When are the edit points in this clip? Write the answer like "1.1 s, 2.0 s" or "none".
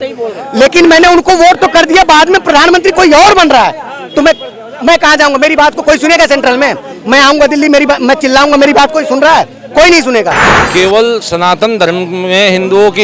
10.5 s